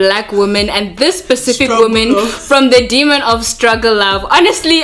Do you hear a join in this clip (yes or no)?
no